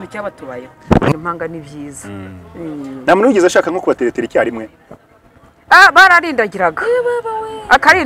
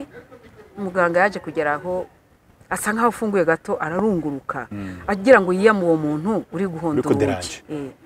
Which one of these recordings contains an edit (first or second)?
first